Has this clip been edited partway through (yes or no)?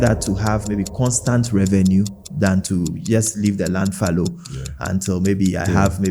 no